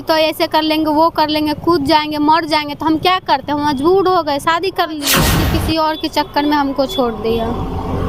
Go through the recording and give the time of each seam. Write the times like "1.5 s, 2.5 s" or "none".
5.4 s